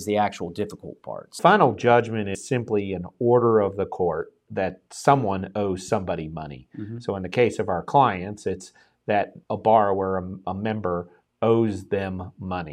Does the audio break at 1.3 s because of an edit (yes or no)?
yes